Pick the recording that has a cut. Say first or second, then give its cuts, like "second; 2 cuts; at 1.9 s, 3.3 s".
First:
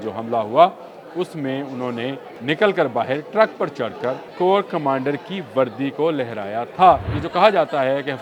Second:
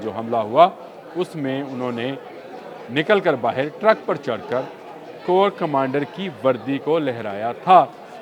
first; 3 cuts; at 2.3 s, 4.2 s, 7.2 s